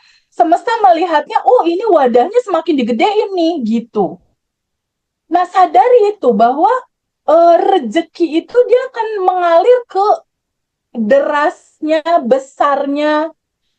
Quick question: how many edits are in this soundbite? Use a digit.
0